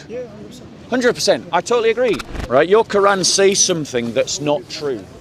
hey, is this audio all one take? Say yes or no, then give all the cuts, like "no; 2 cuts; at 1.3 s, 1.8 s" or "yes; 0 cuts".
no; 1 cut; at 2.2 s